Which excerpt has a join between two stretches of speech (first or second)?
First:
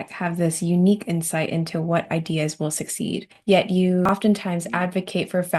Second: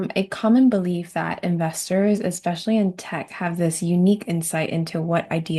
first